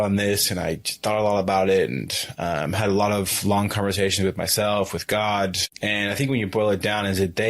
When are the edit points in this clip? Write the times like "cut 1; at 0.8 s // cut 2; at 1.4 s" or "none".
cut 1; at 5.7 s